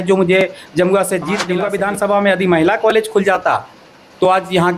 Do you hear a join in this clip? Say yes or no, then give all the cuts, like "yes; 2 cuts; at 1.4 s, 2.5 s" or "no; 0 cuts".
yes; 1 cut; at 1.5 s